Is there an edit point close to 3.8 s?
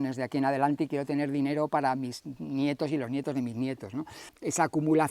no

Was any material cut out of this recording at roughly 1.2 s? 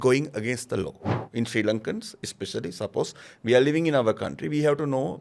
yes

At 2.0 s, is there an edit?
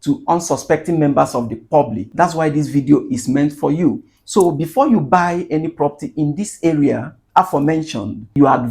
yes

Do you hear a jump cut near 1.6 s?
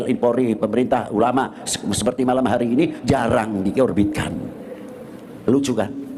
no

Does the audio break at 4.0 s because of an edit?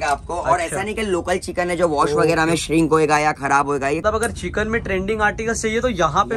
yes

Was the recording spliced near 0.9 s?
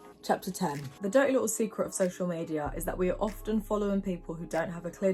yes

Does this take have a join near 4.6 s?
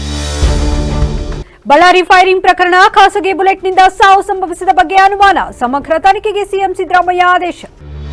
no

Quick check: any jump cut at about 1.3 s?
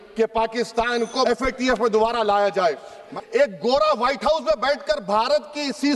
yes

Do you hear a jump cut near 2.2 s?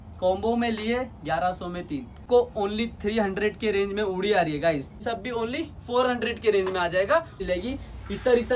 yes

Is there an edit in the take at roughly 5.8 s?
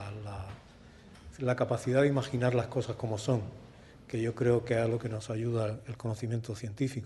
no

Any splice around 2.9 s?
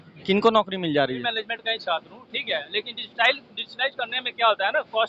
no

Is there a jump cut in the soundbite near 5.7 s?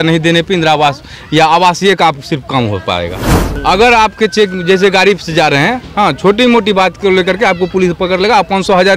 no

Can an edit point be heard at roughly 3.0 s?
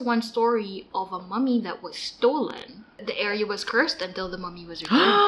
yes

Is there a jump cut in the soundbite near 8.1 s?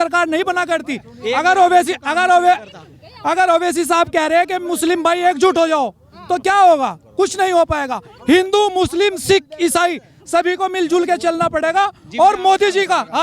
no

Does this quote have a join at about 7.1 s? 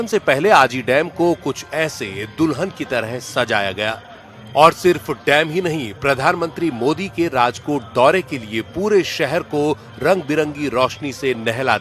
no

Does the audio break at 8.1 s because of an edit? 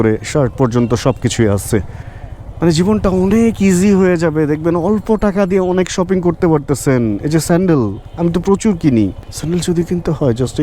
no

